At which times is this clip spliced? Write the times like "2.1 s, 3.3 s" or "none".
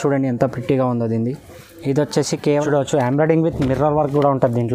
2.6 s